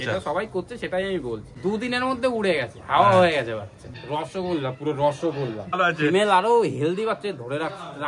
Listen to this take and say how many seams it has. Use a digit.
3